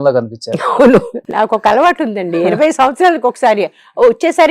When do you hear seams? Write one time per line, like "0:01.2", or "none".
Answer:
0:01.2